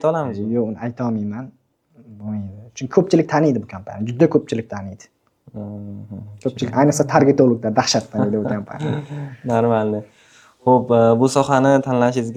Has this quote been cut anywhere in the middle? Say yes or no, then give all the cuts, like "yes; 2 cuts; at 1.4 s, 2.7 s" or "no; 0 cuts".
no; 0 cuts